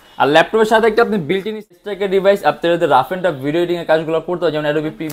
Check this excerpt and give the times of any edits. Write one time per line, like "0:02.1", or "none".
0:01.6